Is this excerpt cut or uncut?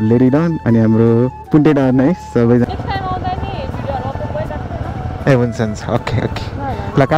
cut